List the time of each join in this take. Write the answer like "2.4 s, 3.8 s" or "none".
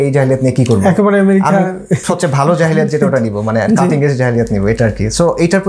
none